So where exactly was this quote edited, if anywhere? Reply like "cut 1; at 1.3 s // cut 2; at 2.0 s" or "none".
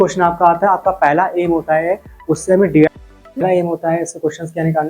cut 1; at 2.9 s